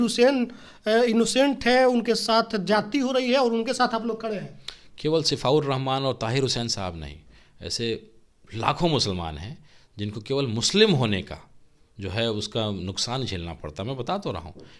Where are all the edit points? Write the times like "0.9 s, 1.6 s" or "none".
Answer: none